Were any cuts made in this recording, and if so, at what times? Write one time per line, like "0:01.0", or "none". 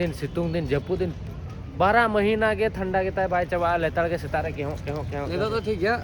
none